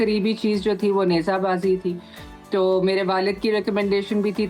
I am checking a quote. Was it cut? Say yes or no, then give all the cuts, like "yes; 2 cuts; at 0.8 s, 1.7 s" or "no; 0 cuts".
no; 0 cuts